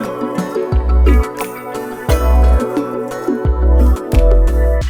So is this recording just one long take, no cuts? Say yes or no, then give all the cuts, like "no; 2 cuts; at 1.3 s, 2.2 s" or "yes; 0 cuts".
yes; 0 cuts